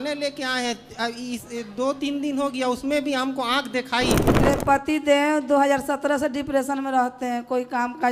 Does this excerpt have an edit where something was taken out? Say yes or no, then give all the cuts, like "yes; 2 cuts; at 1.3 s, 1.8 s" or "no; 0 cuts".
yes; 1 cut; at 4.4 s